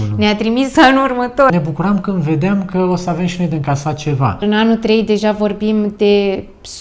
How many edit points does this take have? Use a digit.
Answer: 2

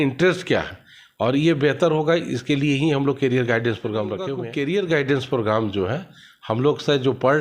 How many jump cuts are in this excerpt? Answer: 1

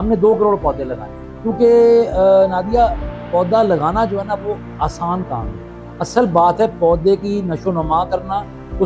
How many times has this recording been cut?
0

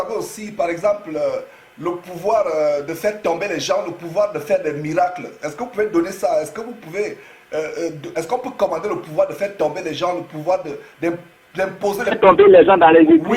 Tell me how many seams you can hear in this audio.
0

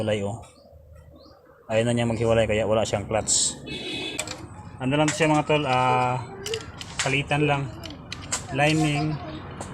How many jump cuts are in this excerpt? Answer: 1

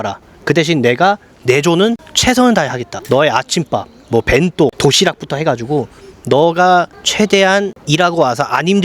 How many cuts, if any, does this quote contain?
2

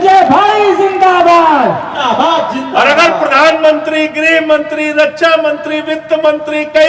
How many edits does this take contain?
1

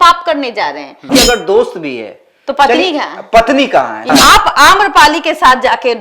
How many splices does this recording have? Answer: 2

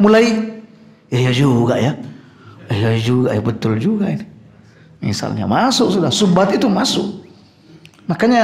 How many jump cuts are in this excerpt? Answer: 0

